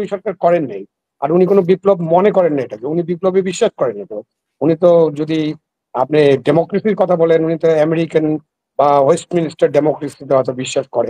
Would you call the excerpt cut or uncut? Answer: uncut